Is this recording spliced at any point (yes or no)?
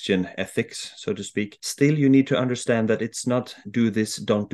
yes